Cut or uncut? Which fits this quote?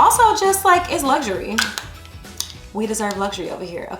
uncut